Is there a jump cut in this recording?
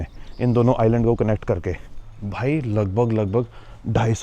yes; 1 cut; at 1.9 s

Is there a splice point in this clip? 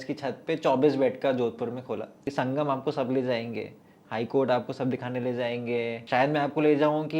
yes; 2 cuts; at 2.3 s, 6.0 s

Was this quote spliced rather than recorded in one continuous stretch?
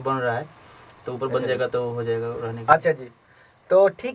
no; 0 cuts

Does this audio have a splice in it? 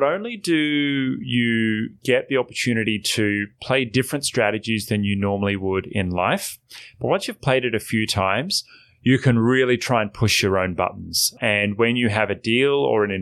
yes; 1 cut; at 11.4 s

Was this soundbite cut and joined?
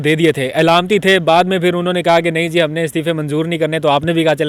no; 0 cuts

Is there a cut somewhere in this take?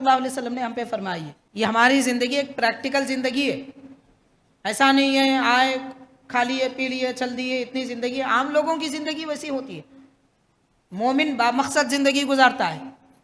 yes; 1 cut; at 1.4 s

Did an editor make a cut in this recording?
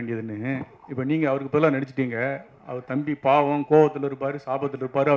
no; 0 cuts

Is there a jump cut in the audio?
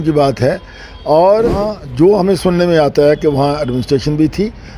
yes; 1 cut; at 1.7 s

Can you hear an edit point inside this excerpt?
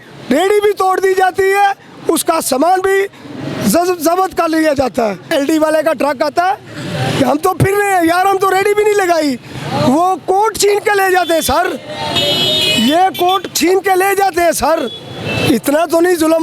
yes; 1 cut; at 5.3 s

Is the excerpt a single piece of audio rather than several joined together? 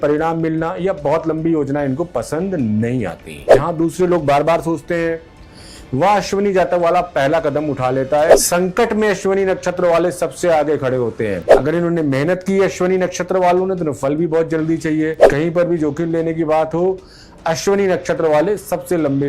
no; 4 cuts; at 3.5 s, 8.3 s, 11.5 s, 15.2 s

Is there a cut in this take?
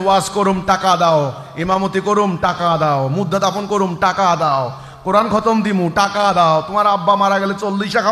no; 0 cuts

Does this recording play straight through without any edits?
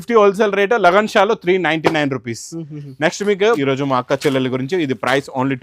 no; 1 cut; at 3.6 s

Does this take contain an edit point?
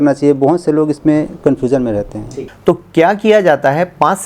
yes; 1 cut; at 2.2 s

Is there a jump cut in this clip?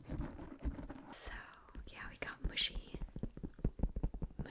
yes; 1 cut; at 1.1 s

